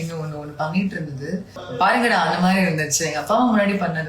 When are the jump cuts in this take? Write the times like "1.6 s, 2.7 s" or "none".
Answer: 1.6 s

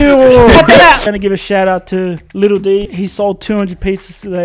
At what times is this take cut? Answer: 1.1 s, 2.2 s, 2.9 s

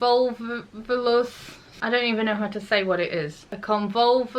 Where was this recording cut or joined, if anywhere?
none

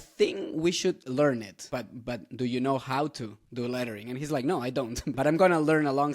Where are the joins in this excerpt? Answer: 1.6 s, 5.1 s

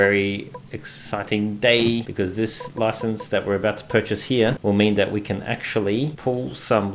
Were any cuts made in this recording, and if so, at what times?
2.1 s, 4.6 s, 6.2 s

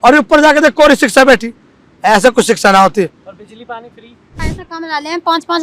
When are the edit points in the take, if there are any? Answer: 4.4 s

